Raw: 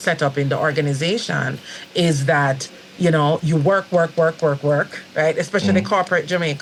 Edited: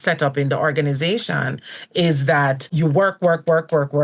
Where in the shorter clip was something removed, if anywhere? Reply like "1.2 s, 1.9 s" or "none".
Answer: 2.7 s